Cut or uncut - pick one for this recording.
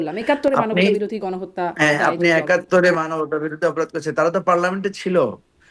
uncut